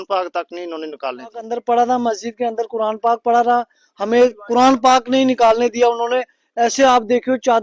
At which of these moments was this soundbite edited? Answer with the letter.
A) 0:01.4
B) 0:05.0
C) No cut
A